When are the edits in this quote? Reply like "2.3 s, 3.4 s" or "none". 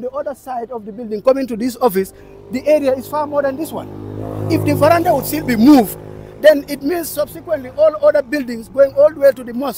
none